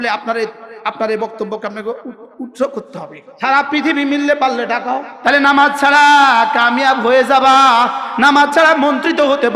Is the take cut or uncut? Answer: cut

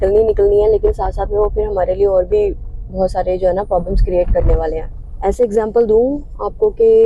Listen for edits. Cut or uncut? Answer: uncut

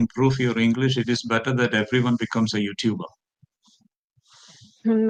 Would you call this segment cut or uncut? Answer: uncut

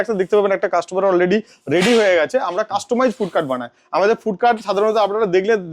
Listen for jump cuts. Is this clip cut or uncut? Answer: uncut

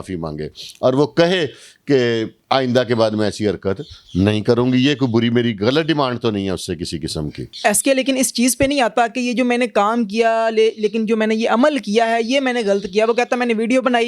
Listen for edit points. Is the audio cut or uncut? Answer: uncut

